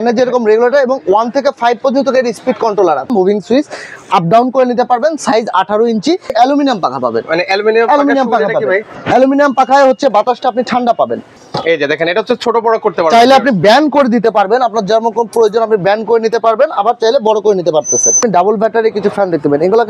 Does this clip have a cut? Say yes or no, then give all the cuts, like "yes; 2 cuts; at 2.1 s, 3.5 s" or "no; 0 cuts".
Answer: yes; 4 cuts; at 3.1 s, 6.3 s, 11.3 s, 18.2 s